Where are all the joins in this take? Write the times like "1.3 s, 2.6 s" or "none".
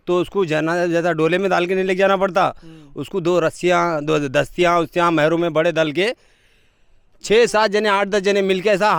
none